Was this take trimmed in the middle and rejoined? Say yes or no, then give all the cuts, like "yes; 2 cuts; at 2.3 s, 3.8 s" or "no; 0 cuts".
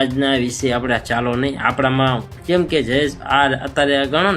no; 0 cuts